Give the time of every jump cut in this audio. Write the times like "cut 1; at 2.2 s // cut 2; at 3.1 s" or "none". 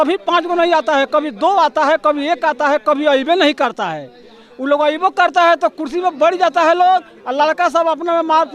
none